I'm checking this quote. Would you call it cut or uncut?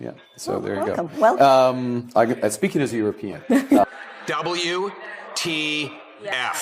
uncut